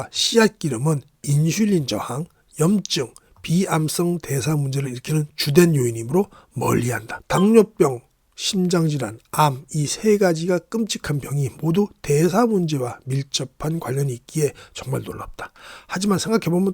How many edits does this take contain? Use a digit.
1